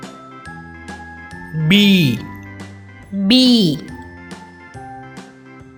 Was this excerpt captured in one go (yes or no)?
yes